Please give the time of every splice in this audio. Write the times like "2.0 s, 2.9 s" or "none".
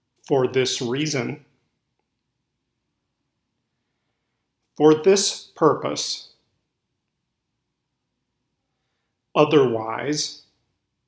none